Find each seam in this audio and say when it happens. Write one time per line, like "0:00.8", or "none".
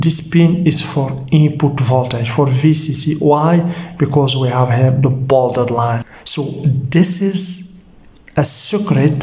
none